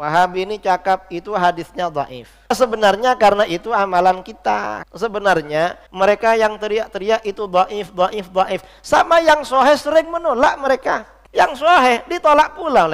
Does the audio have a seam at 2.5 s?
yes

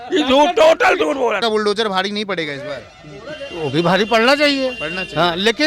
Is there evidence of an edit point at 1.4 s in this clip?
yes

